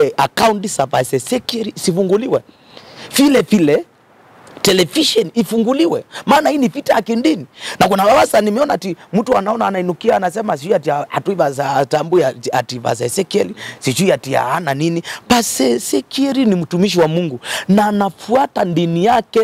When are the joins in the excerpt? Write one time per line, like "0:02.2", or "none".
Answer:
none